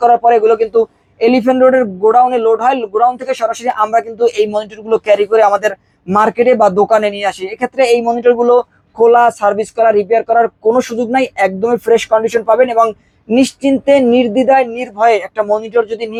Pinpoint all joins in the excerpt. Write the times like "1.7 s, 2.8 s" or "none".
none